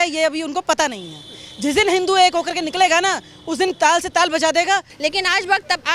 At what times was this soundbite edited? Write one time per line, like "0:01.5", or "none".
0:04.9